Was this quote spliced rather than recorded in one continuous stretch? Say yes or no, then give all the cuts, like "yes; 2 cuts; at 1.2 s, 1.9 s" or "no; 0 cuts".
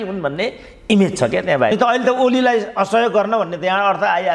yes; 1 cut; at 1.7 s